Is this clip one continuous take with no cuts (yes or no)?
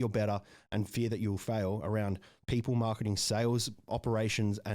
no